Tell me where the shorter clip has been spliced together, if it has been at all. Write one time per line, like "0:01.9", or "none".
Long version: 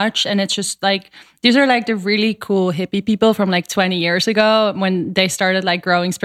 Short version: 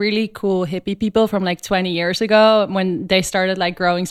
none